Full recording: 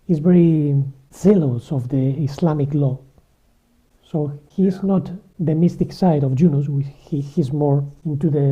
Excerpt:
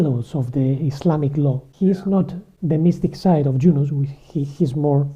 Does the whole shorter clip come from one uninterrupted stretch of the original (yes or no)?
no